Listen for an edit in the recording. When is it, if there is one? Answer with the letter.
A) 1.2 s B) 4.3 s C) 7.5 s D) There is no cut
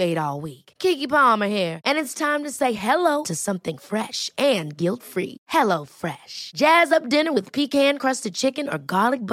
D